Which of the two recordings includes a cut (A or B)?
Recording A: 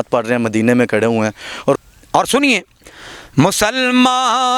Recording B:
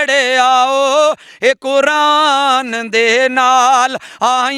A